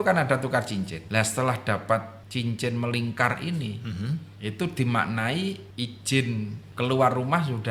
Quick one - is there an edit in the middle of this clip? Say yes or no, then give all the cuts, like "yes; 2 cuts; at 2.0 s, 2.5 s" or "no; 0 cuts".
yes; 5 cuts; at 1.0 s, 2.2 s, 4.3 s, 5.7 s, 6.6 s